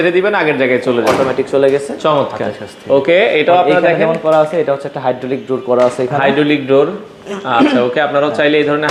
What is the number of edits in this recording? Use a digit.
0